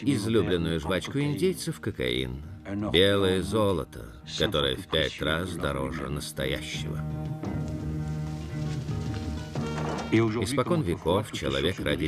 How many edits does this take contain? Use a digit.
1